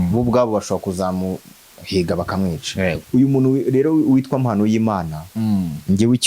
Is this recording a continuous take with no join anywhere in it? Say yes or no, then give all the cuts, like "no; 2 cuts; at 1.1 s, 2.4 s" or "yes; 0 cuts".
no; 1 cut; at 3.0 s